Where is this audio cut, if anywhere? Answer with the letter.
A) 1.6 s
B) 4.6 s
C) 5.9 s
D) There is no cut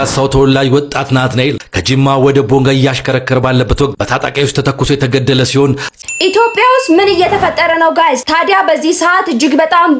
C